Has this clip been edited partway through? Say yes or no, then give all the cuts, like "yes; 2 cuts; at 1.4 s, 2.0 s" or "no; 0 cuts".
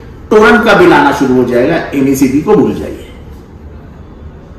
no; 0 cuts